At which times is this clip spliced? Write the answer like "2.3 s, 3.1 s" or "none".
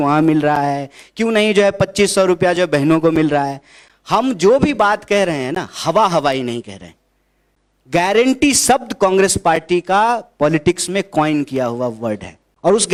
none